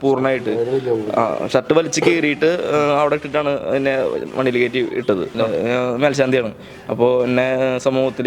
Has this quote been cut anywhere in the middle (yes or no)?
yes